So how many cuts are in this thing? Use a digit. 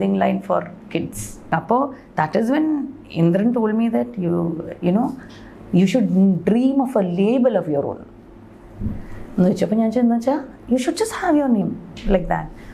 1